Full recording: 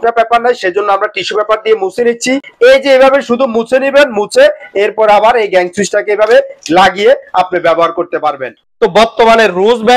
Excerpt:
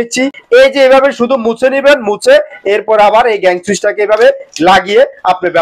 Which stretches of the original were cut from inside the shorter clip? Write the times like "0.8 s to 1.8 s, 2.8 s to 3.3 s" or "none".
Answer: none